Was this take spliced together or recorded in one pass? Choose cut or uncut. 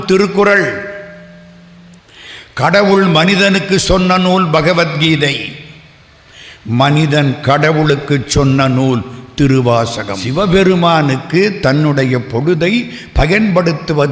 cut